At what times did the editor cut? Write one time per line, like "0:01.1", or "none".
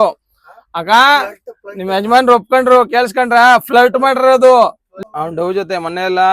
0:04.9